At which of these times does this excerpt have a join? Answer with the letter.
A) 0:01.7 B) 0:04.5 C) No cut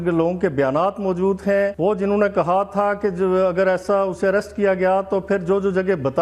A